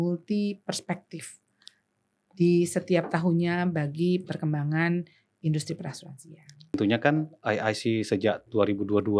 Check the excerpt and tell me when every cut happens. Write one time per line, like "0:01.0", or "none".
0:06.7